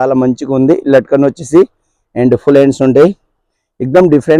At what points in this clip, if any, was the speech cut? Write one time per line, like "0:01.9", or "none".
none